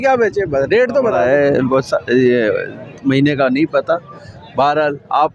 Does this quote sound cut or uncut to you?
cut